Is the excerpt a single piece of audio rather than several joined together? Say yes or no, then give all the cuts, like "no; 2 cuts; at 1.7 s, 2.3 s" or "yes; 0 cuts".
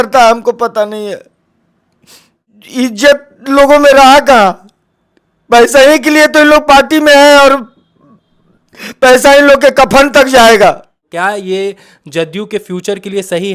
no; 2 cuts; at 2.5 s, 11.0 s